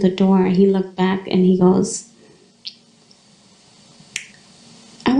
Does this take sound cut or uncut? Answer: uncut